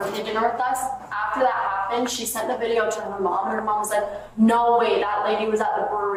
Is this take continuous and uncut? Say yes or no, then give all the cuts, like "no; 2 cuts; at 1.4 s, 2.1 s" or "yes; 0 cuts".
yes; 0 cuts